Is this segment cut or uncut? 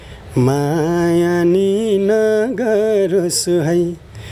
uncut